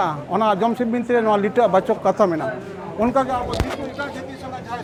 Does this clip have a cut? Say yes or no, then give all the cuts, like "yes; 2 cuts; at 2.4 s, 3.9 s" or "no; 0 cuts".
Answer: no; 0 cuts